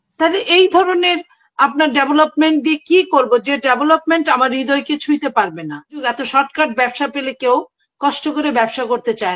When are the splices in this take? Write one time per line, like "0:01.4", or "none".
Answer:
0:06.1